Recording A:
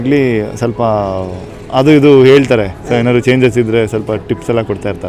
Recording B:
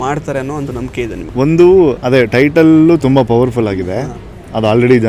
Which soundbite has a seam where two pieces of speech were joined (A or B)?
B